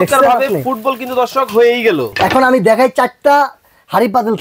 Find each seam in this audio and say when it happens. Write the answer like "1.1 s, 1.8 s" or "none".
2.1 s